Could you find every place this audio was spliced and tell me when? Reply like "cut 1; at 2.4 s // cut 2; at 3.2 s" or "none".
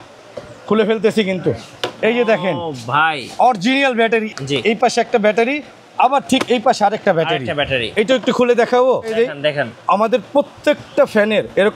cut 1; at 4.3 s // cut 2; at 9.1 s